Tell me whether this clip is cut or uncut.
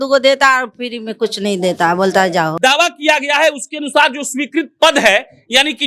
cut